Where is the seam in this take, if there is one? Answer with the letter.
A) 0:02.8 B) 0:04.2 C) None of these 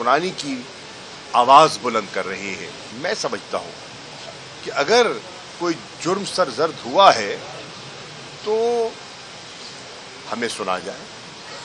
A